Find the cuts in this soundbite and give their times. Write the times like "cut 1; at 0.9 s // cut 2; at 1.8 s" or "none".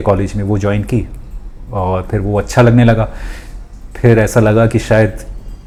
none

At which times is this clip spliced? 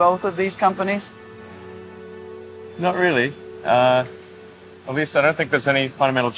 none

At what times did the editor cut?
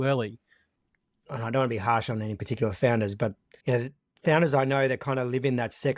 cut 1; at 0.9 s // cut 2; at 3.5 s

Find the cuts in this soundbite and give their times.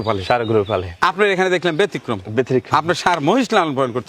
none

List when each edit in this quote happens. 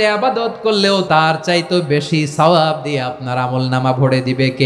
cut 1; at 1.0 s

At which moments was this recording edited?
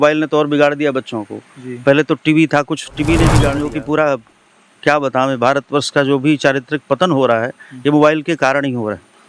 cut 1; at 3.6 s

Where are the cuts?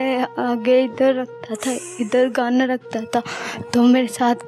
none

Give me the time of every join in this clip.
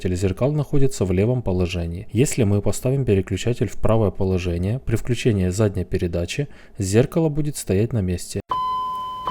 cut 1; at 8.3 s

